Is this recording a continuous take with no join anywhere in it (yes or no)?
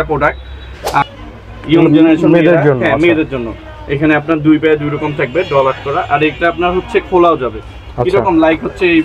no